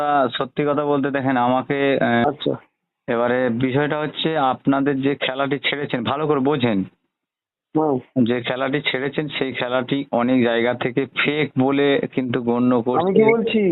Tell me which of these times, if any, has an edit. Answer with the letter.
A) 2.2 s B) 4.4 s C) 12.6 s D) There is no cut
A